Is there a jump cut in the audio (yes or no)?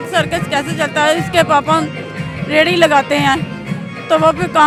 no